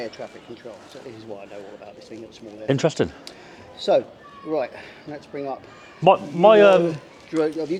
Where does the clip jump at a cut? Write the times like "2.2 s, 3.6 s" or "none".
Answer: none